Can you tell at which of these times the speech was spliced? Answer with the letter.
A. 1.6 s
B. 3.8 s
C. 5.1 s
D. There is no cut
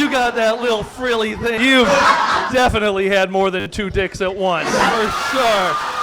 A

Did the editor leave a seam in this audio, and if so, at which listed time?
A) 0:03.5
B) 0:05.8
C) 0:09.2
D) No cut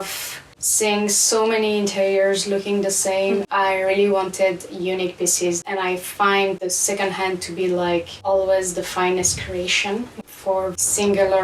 A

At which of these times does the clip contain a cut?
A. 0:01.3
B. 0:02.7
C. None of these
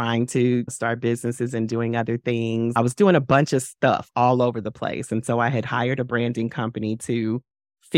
B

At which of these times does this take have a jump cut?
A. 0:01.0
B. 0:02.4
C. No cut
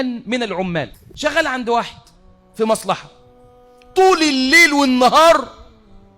A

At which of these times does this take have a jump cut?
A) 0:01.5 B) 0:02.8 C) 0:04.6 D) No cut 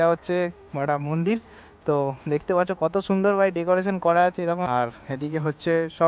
C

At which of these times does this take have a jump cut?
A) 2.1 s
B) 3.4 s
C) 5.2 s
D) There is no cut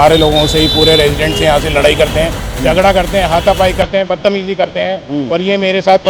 D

